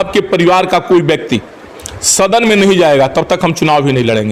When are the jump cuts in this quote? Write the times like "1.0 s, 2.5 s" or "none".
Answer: none